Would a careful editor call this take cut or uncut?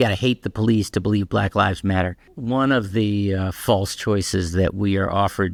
uncut